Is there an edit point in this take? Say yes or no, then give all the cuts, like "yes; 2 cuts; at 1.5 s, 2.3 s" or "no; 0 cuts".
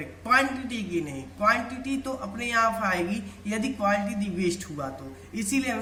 no; 0 cuts